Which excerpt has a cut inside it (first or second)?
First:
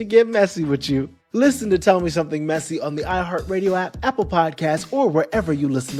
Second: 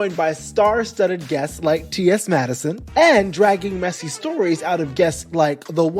second